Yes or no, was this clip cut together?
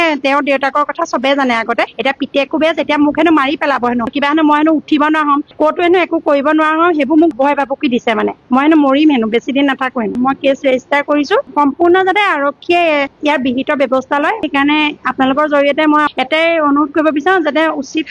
yes